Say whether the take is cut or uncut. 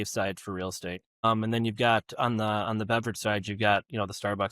cut